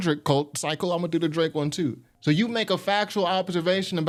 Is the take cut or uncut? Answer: uncut